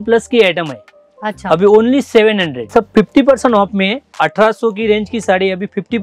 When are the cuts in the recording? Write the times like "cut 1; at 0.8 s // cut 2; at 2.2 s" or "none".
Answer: cut 1; at 2.7 s // cut 2; at 4.1 s